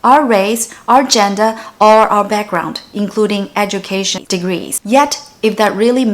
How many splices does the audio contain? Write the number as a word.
one